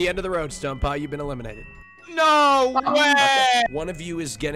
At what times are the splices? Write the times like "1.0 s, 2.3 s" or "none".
3.7 s

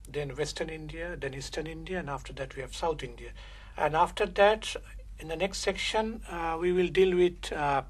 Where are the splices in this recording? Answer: 1.1 s

